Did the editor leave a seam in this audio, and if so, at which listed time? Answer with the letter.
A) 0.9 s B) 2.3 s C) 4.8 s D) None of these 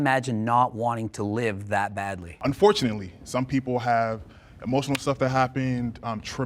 B